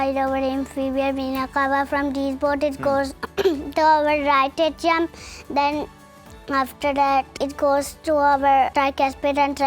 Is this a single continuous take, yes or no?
no